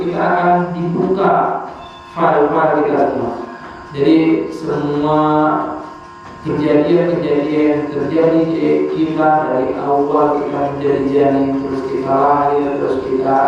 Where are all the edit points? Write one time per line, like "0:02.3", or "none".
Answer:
none